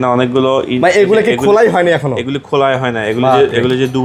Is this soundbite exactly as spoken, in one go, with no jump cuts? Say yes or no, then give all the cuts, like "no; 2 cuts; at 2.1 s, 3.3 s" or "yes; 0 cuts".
yes; 0 cuts